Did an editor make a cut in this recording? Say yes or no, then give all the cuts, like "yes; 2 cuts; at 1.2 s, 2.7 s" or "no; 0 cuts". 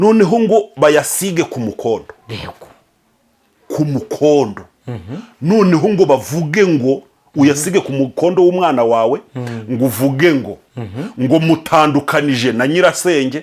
no; 0 cuts